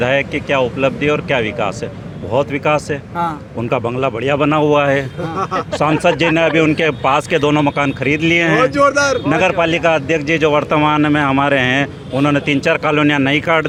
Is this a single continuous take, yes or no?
yes